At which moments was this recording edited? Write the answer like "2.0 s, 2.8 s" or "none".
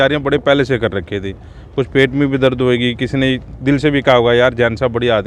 none